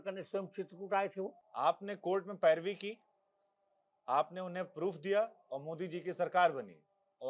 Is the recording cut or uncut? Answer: cut